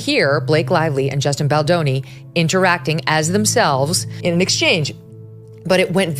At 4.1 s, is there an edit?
yes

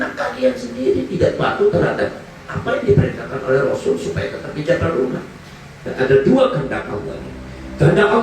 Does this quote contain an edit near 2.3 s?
no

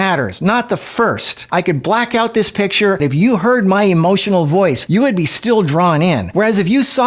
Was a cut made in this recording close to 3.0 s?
no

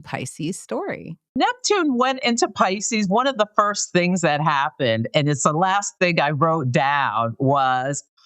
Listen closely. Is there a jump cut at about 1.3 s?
yes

